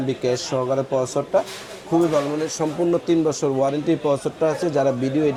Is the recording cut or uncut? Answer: uncut